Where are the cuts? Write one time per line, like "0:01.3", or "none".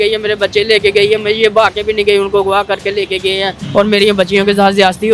0:03.6